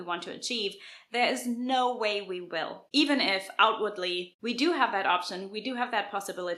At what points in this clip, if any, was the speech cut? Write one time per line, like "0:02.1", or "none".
0:02.8
0:04.3